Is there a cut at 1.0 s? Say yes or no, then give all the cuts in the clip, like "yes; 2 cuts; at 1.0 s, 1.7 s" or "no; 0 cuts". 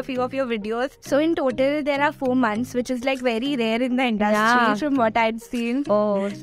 yes; 1 cut; at 1.0 s